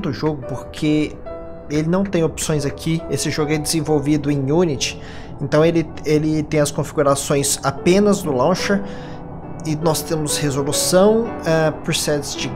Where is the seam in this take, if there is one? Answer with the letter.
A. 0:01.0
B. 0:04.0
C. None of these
B